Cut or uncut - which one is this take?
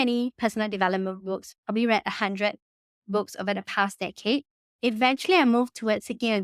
cut